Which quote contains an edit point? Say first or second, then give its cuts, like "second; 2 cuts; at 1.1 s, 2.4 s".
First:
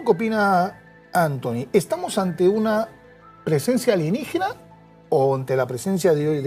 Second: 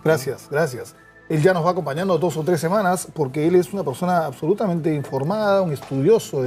second; 1 cut; at 4.1 s